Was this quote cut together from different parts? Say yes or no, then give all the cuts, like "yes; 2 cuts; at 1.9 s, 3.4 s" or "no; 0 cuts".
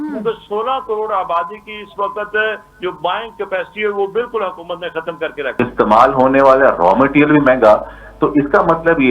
yes; 1 cut; at 5.5 s